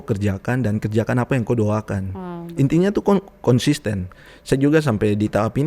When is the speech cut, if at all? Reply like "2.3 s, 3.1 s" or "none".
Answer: 4.1 s